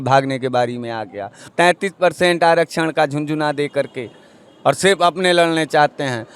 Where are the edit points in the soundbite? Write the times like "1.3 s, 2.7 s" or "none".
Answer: 1.4 s